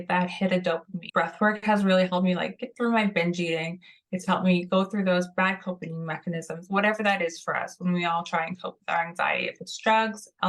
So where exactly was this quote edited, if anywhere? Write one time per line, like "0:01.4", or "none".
0:01.0